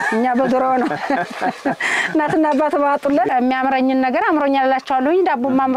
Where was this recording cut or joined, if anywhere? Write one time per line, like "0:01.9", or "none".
0:03.3